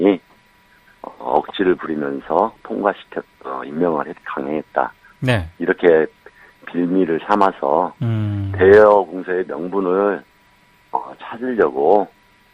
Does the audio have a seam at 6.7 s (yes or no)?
no